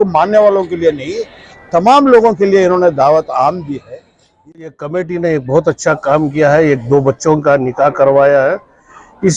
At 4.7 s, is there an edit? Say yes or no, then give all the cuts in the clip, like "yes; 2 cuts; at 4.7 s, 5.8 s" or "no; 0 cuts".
yes; 1 cut; at 4.7 s